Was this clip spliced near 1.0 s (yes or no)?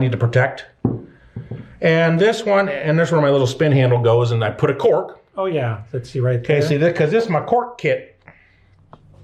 no